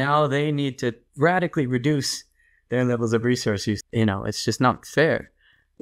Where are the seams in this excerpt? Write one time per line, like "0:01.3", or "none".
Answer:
0:01.0
0:03.8